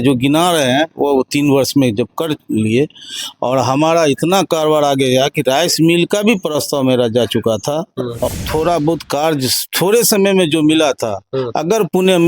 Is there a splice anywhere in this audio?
yes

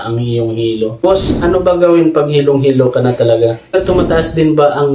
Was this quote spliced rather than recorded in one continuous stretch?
yes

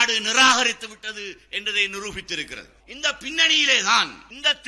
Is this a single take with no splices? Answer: yes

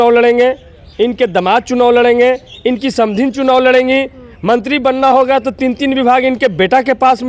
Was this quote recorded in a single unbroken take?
yes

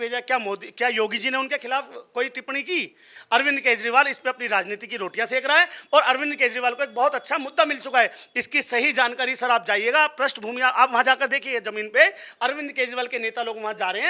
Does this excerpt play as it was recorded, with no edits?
no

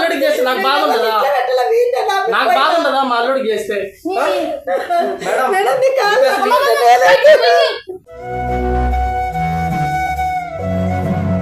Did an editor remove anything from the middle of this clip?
no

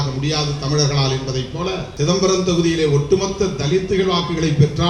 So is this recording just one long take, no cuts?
no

